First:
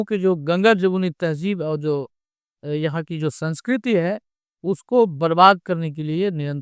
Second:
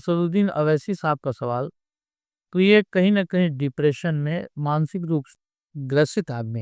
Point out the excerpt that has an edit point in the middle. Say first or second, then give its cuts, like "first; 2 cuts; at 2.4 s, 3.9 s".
second; 1 cut; at 5.3 s